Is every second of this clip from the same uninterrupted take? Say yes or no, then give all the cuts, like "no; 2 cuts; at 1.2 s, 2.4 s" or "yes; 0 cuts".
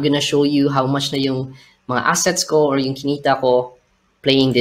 yes; 0 cuts